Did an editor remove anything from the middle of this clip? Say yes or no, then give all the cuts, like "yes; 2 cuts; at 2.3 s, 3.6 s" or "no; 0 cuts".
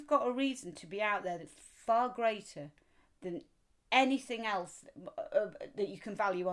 no; 0 cuts